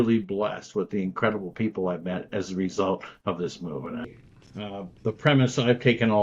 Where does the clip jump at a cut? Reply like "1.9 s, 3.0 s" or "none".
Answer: 4.1 s